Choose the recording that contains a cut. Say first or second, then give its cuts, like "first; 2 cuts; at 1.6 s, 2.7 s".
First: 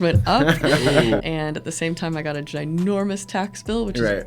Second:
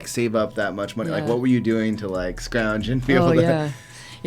first; 1 cut; at 1.2 s